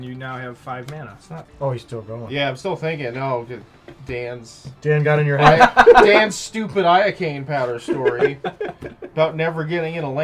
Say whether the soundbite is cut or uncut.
cut